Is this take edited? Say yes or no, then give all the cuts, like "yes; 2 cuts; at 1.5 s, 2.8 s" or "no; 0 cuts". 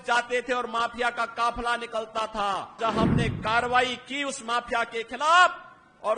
yes; 1 cut; at 2.8 s